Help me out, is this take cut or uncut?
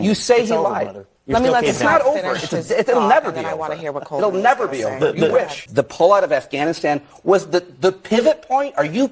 cut